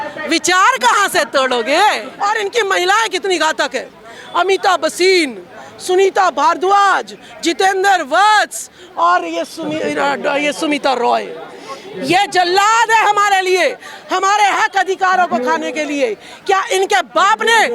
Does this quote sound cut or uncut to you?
cut